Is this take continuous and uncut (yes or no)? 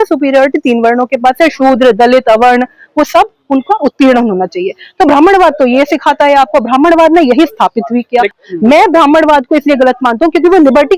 no